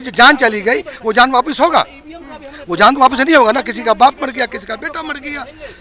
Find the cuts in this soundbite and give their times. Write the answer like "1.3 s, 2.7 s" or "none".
none